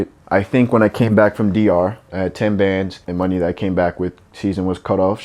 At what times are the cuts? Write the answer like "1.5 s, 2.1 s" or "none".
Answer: 2.1 s